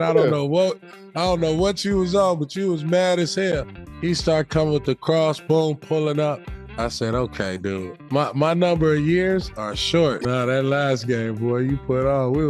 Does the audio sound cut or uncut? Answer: cut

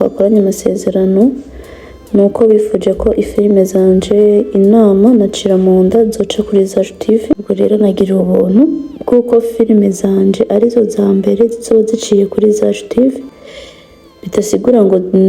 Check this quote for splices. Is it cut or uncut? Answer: cut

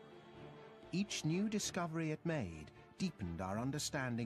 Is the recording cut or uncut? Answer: uncut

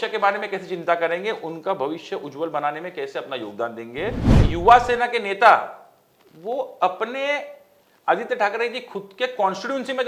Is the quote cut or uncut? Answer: cut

